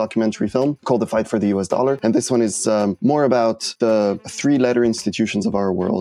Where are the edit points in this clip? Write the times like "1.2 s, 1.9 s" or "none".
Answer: 0.8 s, 2.0 s, 3.0 s, 4.1 s